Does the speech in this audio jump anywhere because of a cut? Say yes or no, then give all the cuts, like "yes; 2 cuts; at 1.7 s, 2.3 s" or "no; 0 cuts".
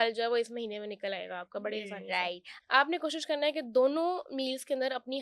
yes; 1 cut; at 2.5 s